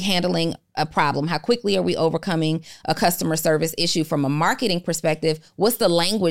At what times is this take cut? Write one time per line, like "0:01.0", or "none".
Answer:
none